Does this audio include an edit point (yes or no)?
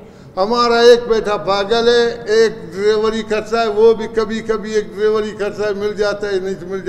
no